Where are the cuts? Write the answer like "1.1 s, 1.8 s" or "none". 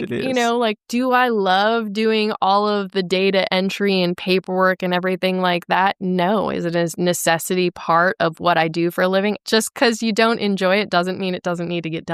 9.4 s